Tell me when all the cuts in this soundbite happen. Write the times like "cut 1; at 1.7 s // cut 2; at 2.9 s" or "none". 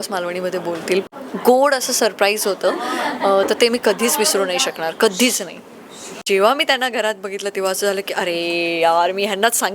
cut 1; at 1.0 s // cut 2; at 6.2 s